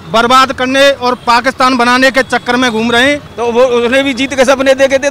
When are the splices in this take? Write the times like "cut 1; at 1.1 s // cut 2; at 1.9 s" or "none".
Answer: cut 1; at 3.3 s